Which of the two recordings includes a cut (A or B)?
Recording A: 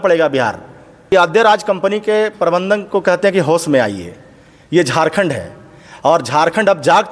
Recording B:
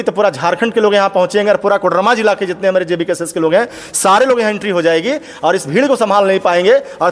A